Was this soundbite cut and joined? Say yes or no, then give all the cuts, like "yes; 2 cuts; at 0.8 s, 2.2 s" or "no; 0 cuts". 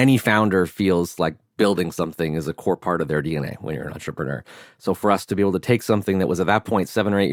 no; 0 cuts